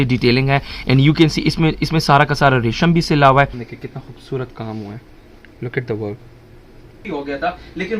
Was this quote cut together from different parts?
yes; 2 cuts; at 3.6 s, 7.0 s

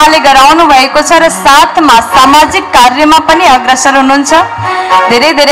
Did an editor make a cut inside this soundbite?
no; 0 cuts

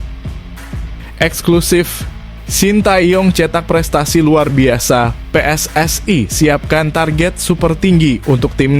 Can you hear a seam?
yes; 1 cut; at 1.1 s

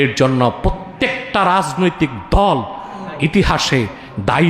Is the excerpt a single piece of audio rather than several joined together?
yes; 0 cuts

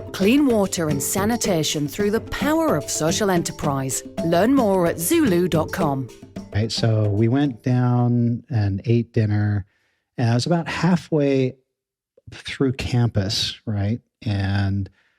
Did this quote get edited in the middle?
yes; 1 cut; at 6.5 s

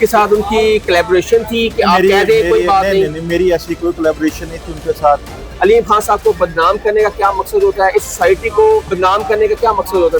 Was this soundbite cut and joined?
yes; 2 cuts; at 5.4 s, 8.9 s

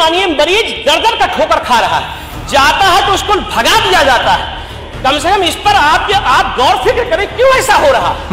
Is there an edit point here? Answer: no; 0 cuts

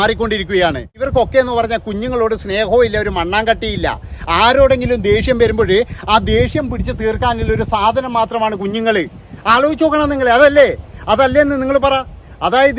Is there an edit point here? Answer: yes; 1 cut; at 1.0 s

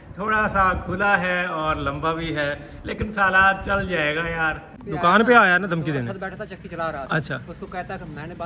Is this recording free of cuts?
no; 1 cut; at 4.7 s

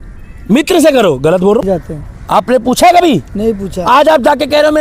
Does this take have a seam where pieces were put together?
yes; 1 cut; at 1.6 s

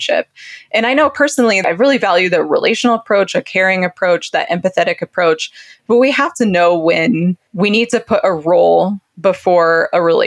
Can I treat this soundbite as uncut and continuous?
no; 2 cuts; at 1.6 s, 7.4 s

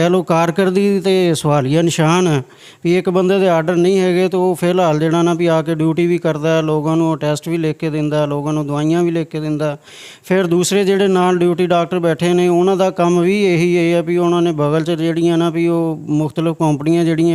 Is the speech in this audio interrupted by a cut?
no; 0 cuts

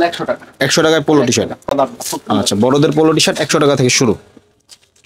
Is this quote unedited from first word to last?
yes; 0 cuts

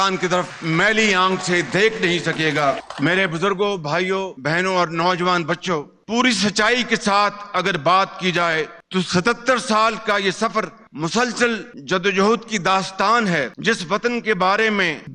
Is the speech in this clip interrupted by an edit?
no; 0 cuts

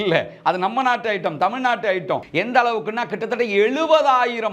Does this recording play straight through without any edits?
no; 1 cut; at 2.3 s

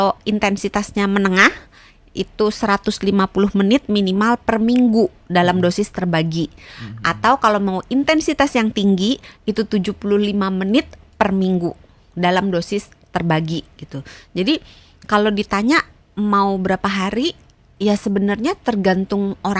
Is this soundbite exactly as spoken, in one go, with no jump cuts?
yes; 0 cuts

